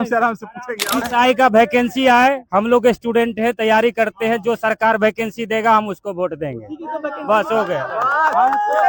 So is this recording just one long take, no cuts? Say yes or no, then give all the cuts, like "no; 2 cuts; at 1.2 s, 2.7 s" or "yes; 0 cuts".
no; 1 cut; at 1.0 s